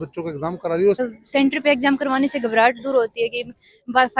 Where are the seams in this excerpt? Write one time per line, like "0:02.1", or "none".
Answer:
0:01.0